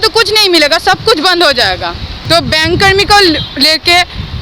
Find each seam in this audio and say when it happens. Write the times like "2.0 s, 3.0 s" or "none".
2.2 s